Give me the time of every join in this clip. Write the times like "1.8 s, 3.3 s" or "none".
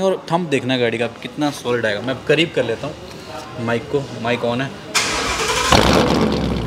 none